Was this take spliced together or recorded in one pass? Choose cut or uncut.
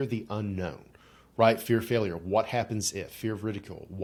uncut